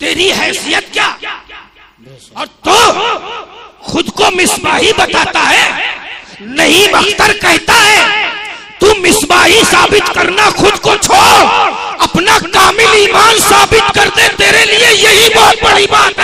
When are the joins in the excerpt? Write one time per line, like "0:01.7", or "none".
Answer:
none